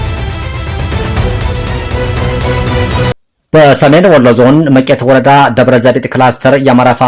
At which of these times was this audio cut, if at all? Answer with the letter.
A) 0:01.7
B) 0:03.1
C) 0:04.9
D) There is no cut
B